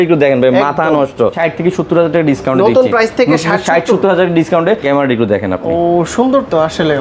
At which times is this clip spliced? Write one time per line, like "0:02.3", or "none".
0:01.3
0:04.8